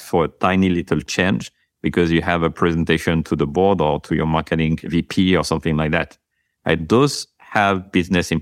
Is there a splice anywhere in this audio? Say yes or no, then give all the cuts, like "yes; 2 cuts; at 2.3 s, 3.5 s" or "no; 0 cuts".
yes; 1 cut; at 4.8 s